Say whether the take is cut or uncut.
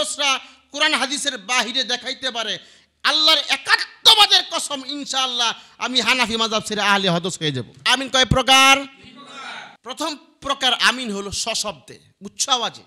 cut